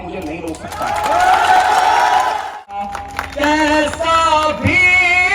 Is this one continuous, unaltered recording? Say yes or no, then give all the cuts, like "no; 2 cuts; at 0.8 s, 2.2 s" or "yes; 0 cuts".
no; 1 cut; at 2.8 s